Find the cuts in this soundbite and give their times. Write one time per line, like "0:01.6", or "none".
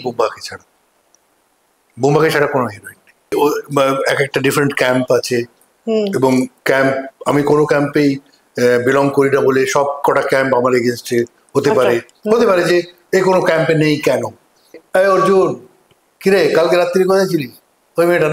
0:03.3
0:14.8